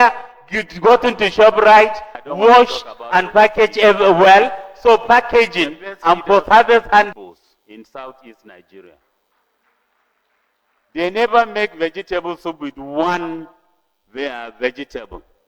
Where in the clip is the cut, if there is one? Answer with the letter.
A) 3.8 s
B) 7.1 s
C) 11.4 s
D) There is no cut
B